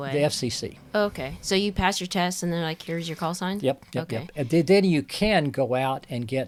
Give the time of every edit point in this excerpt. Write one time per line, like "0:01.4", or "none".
none